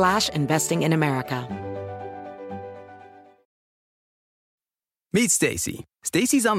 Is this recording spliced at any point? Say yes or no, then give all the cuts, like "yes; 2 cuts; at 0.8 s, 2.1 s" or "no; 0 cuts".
yes; 1 cut; at 1.4 s